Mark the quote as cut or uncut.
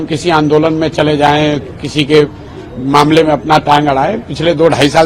uncut